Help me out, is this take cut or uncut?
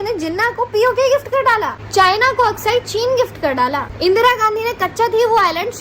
cut